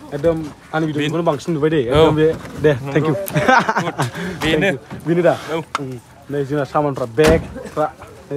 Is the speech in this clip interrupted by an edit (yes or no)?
no